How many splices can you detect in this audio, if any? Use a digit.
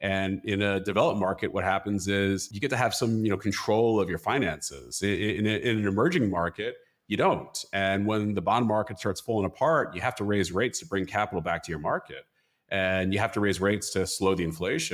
1